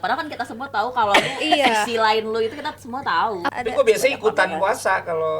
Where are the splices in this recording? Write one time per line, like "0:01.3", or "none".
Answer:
0:03.5